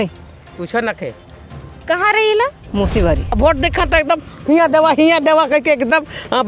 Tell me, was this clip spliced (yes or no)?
yes